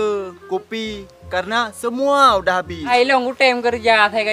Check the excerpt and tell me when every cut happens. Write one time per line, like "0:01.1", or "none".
0:02.9